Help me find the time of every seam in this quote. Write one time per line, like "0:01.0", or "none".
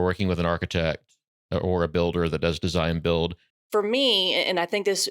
0:03.5

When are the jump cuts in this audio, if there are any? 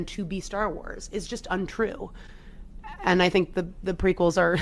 0:02.5

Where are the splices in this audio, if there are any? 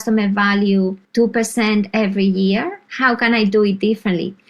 0:01.0
0:02.8

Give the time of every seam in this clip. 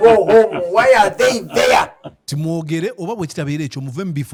none

